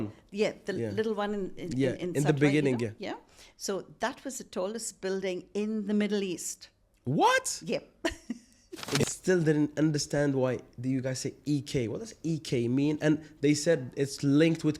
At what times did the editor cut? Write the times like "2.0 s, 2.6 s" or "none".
9.0 s